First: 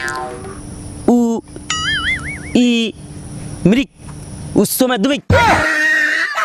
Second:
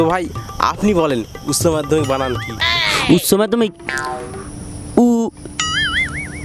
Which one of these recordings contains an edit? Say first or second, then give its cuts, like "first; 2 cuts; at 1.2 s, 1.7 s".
first; 1 cut; at 5.3 s